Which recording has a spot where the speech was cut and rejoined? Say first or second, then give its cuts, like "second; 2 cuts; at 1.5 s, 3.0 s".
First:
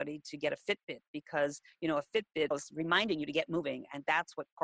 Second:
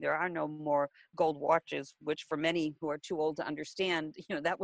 first; 1 cut; at 2.5 s